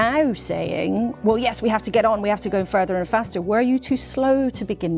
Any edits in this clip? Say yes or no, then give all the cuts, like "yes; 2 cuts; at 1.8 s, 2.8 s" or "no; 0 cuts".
no; 0 cuts